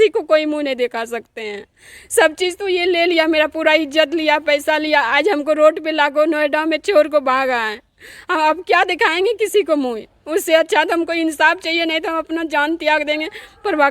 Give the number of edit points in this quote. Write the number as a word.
zero